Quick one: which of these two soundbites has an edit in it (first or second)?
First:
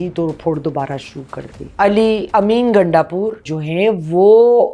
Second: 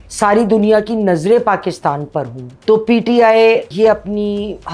first